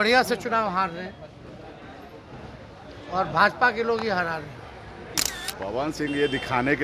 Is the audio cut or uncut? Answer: cut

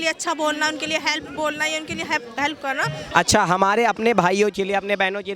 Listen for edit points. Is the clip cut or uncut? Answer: cut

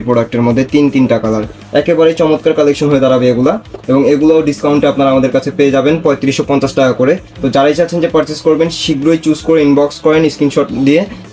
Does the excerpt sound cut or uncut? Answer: uncut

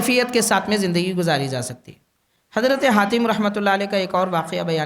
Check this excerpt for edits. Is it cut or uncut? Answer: uncut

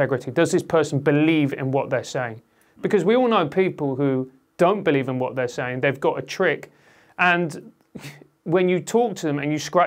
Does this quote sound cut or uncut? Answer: uncut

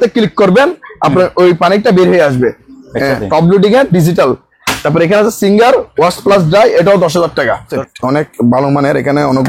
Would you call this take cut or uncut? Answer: cut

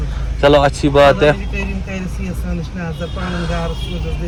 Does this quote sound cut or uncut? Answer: uncut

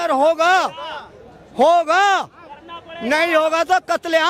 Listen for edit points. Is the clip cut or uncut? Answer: uncut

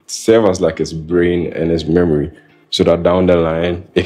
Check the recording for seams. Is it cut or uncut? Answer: uncut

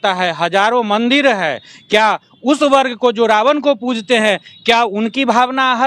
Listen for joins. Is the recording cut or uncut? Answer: uncut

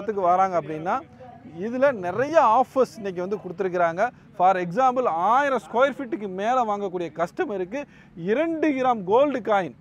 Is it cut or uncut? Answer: uncut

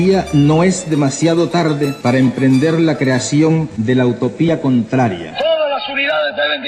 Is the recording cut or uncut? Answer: cut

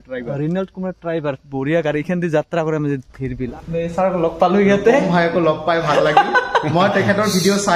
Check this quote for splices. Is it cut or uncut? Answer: cut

